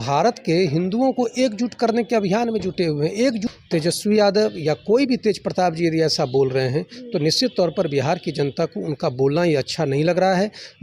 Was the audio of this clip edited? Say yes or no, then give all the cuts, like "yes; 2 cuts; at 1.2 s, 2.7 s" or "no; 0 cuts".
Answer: yes; 1 cut; at 3.5 s